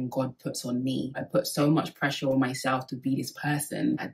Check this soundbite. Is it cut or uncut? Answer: cut